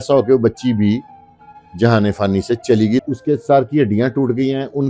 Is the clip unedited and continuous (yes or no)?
no